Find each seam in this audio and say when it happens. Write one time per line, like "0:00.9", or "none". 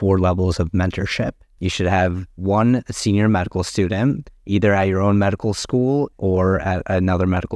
0:01.5
0:04.3
0:06.1

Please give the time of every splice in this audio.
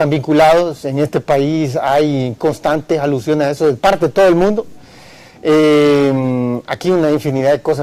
none

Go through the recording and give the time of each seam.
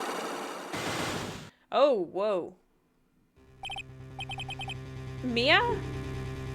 none

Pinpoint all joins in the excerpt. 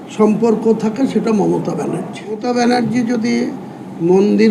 0:02.4

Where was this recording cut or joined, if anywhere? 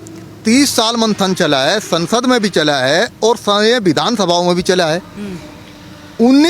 none

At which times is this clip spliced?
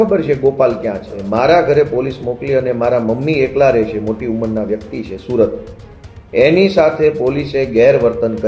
0:01.2

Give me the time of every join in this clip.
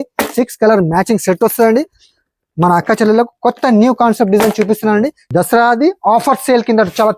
0:05.2

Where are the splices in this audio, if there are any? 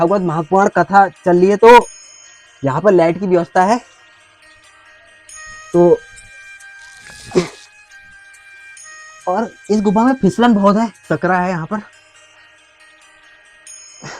0:11.0

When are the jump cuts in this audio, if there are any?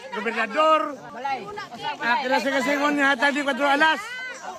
0:01.1

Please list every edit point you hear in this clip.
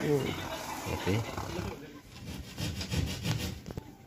0:01.9

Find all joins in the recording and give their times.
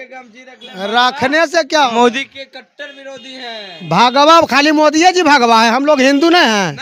none

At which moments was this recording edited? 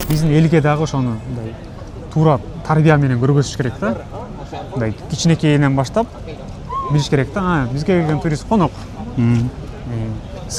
none

